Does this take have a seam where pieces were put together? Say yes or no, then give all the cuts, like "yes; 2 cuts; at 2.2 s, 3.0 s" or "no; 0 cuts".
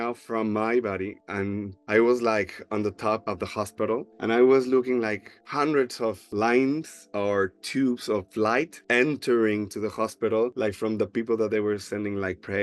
no; 0 cuts